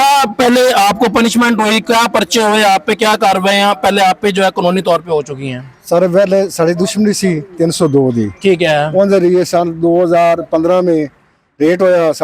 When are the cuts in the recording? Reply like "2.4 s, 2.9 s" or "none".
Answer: none